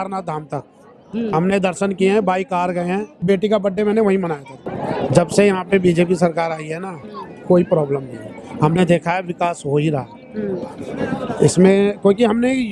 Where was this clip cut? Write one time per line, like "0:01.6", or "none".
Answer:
0:03.1
0:04.7